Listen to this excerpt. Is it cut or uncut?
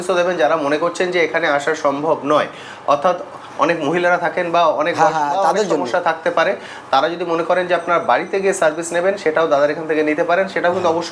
uncut